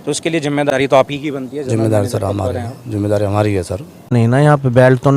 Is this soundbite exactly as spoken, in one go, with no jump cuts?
no; 2 cuts; at 0.7 s, 4.1 s

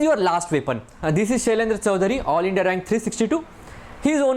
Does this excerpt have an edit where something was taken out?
yes; 1 cut; at 0.9 s

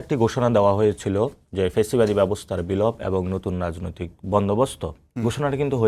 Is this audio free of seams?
yes; 0 cuts

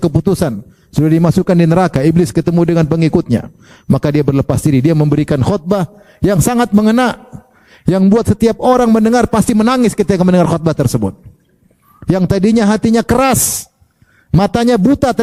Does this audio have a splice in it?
no; 0 cuts

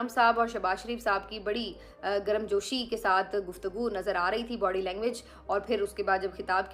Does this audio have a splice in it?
no; 0 cuts

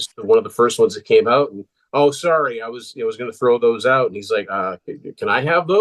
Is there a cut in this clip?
no; 0 cuts

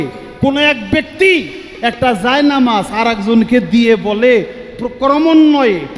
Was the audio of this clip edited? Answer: no; 0 cuts

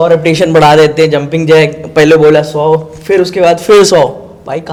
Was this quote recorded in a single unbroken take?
yes; 0 cuts

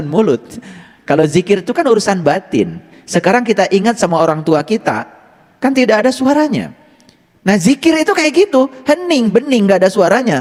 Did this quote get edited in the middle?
no; 0 cuts

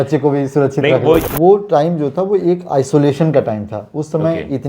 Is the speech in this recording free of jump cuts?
no; 1 cut; at 1.3 s

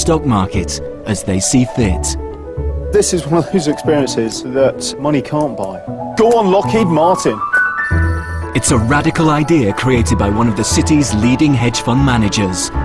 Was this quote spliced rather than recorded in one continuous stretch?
no; 0 cuts

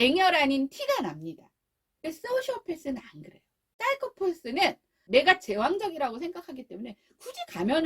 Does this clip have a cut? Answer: yes; 2 cuts; at 3.8 s, 4.9 s

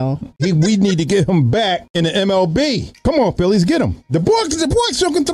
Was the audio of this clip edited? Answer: yes; 2 cuts; at 1.9 s, 2.9 s

